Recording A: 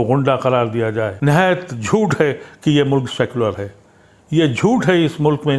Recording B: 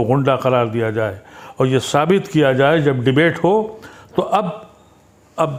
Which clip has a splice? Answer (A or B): A